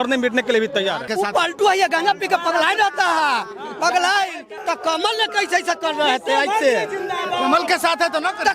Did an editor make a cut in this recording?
yes; 2 cuts; at 1.1 s, 4.5 s

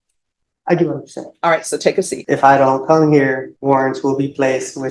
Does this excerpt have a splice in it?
yes; 2 cuts; at 2.2 s, 3.5 s

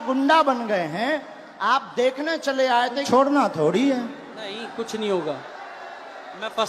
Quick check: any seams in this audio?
yes; 1 cut; at 3.1 s

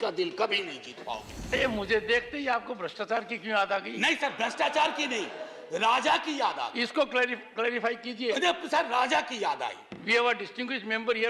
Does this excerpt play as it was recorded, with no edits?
no; 1 cut; at 1.5 s

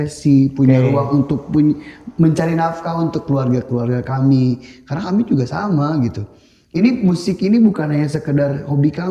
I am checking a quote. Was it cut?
no; 0 cuts

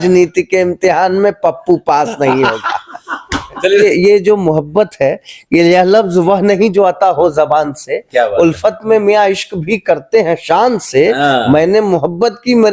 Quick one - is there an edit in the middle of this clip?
yes; 1 cut; at 3.5 s

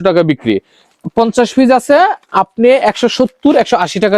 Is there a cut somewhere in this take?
no; 0 cuts

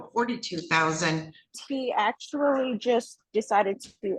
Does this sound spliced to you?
yes; 1 cut; at 1.6 s

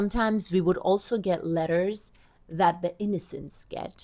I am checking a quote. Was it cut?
no; 0 cuts

